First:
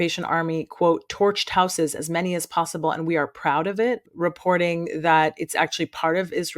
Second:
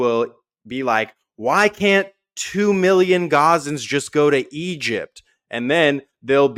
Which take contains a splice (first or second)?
first